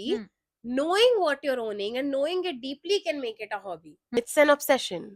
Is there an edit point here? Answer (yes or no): yes